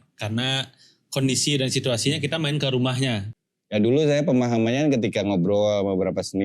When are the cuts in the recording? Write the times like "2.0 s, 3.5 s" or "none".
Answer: 3.3 s

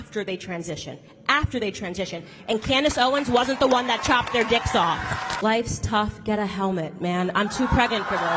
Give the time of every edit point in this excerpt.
5.4 s

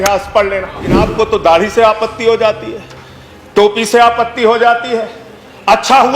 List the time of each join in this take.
1.0 s

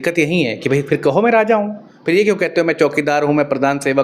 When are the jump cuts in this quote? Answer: none

